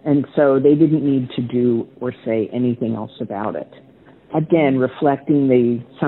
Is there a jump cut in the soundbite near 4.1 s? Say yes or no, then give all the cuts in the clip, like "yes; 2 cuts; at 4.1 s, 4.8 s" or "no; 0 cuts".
no; 0 cuts